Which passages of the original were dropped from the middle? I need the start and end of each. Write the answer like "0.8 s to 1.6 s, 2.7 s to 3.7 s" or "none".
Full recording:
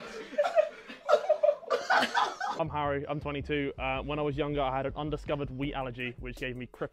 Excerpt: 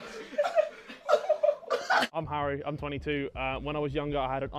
2.1 s to 2.5 s